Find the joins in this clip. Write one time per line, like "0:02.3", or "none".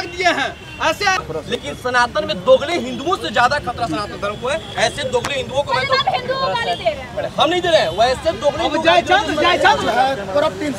0:01.2
0:09.8